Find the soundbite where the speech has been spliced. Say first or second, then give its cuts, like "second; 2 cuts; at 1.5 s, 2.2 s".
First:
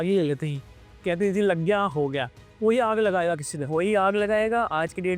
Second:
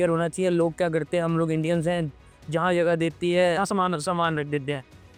first; 1 cut; at 2.6 s